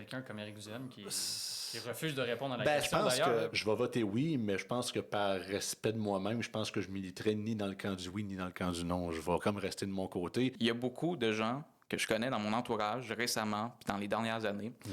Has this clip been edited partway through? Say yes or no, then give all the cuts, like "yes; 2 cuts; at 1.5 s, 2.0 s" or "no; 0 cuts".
yes; 2 cuts; at 3.5 s, 10.6 s